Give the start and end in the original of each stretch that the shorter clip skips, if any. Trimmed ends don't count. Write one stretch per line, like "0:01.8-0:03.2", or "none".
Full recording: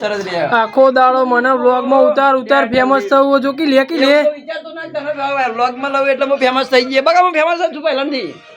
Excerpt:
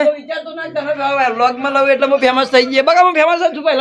none